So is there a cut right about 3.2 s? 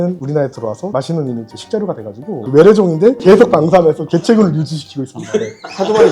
yes; 2 cuts; at 2.4 s, 3.2 s

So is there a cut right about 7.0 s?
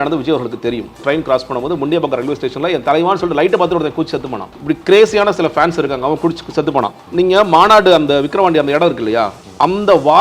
yes; 3 cuts; at 1.0 s, 4.6 s, 7.0 s

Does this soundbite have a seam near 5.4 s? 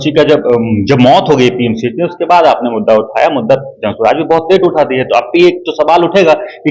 no; 0 cuts

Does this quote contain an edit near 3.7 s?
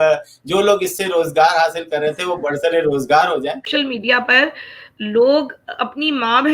yes; 1 cut; at 3.7 s

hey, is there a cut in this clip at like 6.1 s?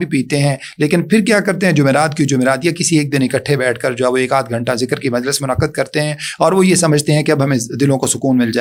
no; 0 cuts

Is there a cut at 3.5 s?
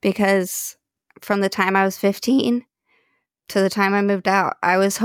no; 1 cut; at 0.9 s

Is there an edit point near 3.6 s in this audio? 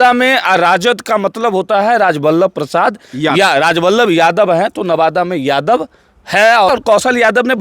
no; 1 cut; at 6.7 s

